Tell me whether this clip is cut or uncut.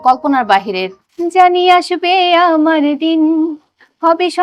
cut